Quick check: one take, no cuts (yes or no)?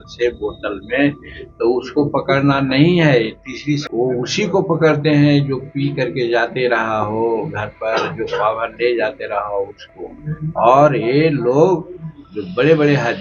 no